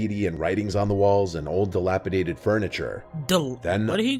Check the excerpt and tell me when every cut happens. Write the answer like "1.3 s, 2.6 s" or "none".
2.7 s